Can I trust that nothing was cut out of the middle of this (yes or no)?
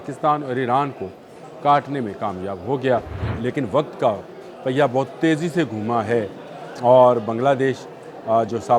no